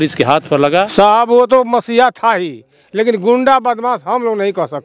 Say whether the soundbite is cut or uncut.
cut